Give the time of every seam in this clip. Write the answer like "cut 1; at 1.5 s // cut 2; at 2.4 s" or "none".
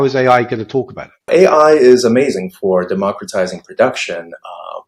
cut 1; at 1.3 s